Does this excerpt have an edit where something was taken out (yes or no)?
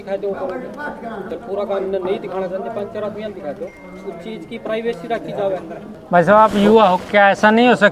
yes